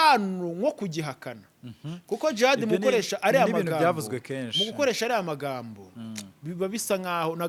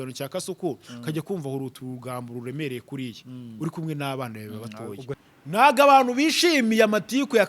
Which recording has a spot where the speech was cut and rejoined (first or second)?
second